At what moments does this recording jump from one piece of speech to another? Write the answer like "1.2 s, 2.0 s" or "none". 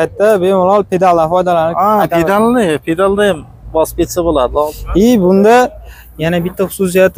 4.7 s